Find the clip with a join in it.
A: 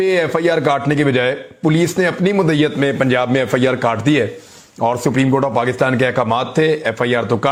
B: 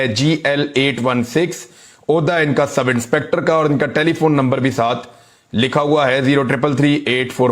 B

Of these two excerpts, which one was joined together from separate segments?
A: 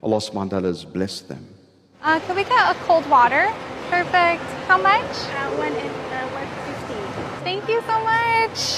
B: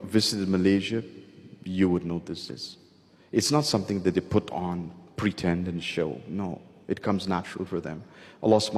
A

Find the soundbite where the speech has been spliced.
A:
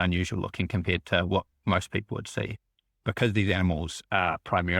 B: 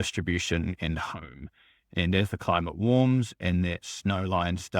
A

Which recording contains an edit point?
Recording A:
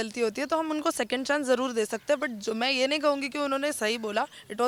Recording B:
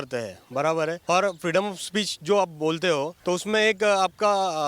B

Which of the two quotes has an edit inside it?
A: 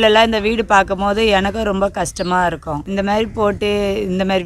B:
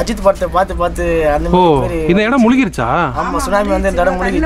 A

